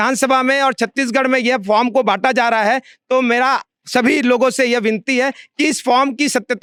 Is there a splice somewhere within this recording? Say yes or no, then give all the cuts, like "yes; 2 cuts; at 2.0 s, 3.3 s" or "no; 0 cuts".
no; 0 cuts